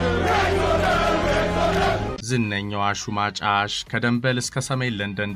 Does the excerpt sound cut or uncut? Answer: cut